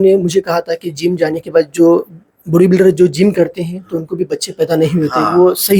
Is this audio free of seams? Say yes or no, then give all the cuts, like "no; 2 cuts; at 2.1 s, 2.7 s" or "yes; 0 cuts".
yes; 0 cuts